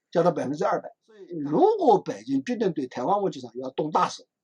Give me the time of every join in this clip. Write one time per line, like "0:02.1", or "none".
0:01.4